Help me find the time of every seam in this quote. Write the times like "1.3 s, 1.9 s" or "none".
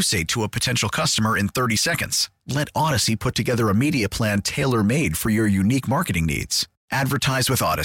none